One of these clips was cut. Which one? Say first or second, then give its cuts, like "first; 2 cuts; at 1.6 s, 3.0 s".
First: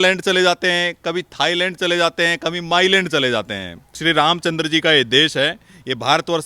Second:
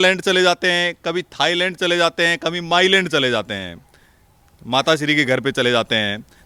first; 1 cut; at 3.9 s